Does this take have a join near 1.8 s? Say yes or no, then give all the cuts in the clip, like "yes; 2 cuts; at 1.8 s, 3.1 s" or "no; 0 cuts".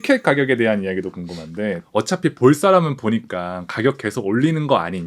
yes; 1 cut; at 1.8 s